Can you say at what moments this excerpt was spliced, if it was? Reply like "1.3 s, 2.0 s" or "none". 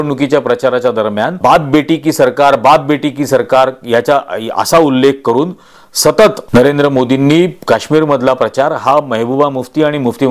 1.4 s, 6.4 s